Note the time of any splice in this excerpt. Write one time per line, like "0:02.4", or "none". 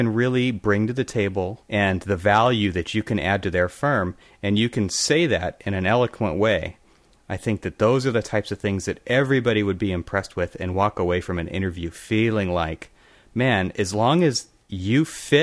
0:01.6